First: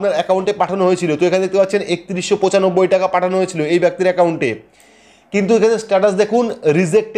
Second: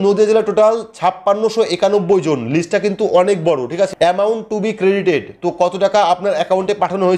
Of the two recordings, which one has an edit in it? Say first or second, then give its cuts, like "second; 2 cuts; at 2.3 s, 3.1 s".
second; 1 cut; at 3.9 s